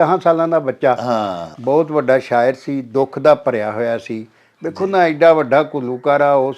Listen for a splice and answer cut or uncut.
cut